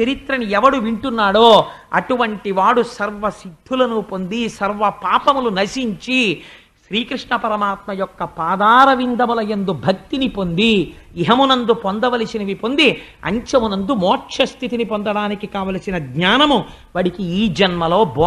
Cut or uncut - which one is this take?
uncut